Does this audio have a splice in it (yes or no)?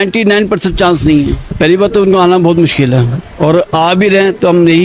yes